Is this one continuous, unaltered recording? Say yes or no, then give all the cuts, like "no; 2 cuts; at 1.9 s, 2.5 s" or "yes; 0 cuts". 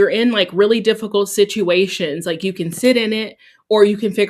yes; 0 cuts